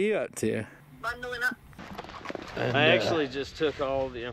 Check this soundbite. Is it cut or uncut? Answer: cut